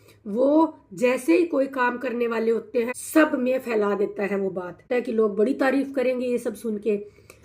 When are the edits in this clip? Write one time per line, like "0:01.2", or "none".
0:03.0
0:04.8